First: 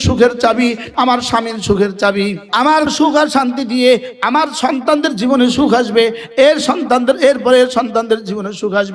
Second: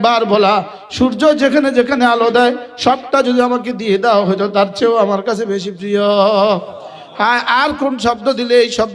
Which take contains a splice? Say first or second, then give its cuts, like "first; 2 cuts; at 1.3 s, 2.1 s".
first; 2 cuts; at 0.9 s, 2.8 s